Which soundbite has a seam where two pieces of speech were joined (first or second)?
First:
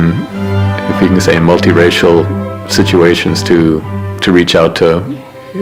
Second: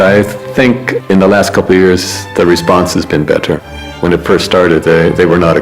second